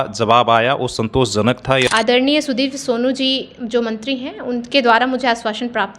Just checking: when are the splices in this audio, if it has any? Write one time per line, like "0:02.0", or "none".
0:01.9